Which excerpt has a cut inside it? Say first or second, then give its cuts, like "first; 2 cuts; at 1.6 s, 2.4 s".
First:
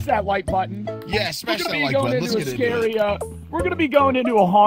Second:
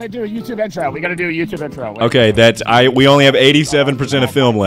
second; 1 cut; at 1.9 s